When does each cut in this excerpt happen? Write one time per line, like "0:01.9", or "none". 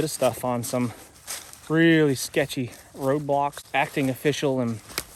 0:03.6